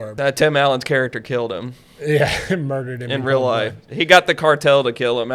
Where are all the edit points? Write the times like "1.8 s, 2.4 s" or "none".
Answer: none